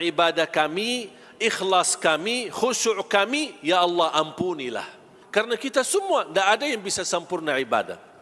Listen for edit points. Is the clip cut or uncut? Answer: cut